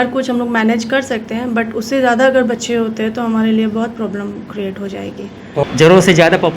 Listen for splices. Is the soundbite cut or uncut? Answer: cut